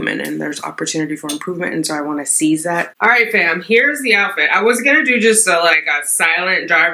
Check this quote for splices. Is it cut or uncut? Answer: cut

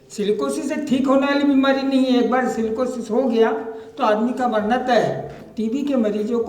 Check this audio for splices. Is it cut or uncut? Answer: cut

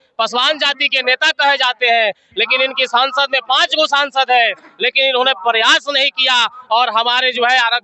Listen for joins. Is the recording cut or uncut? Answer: uncut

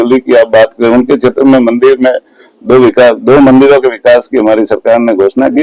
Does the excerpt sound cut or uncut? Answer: uncut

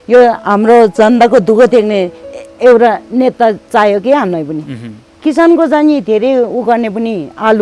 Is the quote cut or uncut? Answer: cut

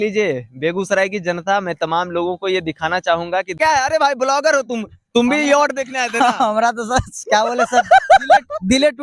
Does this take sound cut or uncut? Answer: cut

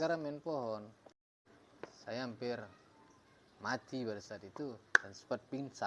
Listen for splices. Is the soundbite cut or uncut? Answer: cut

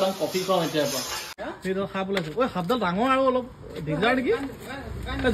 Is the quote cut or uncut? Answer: cut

